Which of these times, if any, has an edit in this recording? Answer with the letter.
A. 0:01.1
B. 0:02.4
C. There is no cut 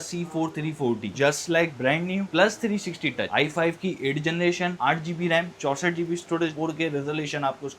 A